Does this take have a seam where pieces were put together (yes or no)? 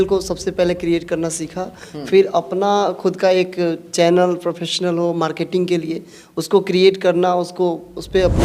no